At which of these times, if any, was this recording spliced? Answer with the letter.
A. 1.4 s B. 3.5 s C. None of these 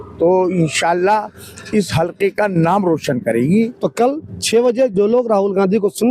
B